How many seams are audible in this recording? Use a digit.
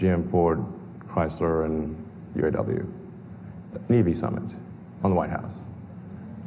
0